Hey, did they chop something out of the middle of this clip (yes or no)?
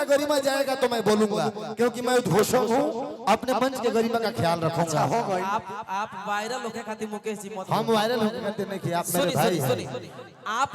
yes